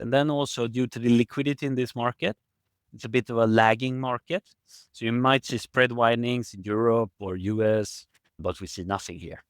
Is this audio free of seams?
no; 1 cut; at 8.4 s

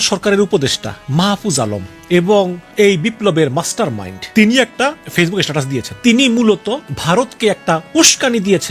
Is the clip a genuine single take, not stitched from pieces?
no; 6 cuts; at 1.9 s, 2.6 s, 4.1 s, 4.7 s, 5.9 s, 6.9 s

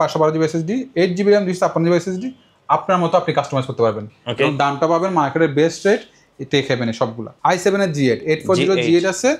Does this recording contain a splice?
yes; 1 cut; at 7.3 s

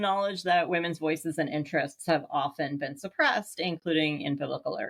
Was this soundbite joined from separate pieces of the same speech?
no; 0 cuts

